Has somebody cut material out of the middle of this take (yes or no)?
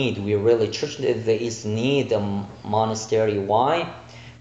no